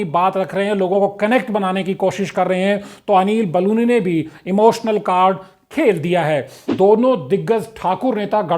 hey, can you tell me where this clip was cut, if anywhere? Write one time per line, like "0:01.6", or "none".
0:06.7